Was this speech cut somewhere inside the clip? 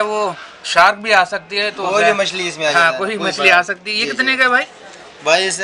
no; 0 cuts

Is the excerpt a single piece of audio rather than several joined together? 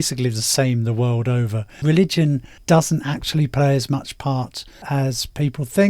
no; 1 cut; at 2.5 s

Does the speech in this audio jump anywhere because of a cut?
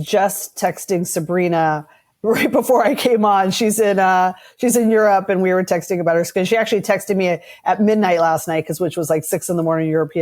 no; 0 cuts

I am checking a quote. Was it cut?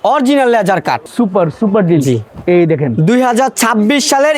yes; 2 cuts; at 1.0 s, 2.3 s

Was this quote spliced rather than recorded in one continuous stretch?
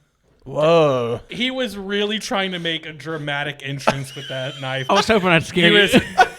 yes; 2 cuts; at 1.2 s, 4.9 s

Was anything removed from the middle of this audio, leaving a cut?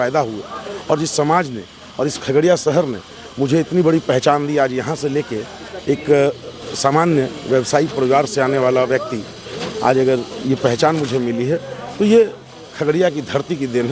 no; 0 cuts

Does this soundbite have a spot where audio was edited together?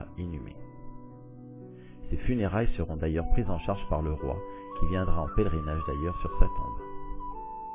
yes; 1 cut; at 6.2 s

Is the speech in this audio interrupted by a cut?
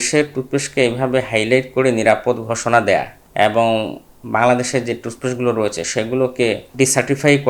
yes; 2 cuts; at 3.2 s, 6.7 s

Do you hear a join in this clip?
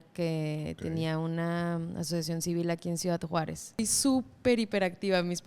yes; 1 cut; at 3.8 s

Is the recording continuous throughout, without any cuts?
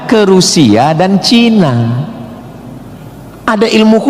no; 1 cut; at 1.8 s

